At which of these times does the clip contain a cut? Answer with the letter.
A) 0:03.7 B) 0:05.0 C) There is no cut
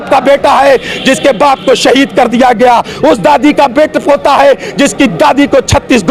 C